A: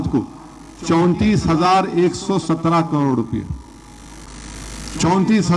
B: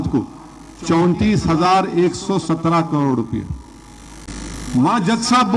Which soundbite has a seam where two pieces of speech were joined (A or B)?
B